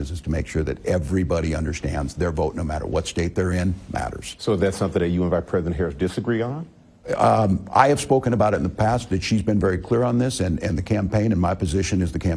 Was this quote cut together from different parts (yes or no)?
no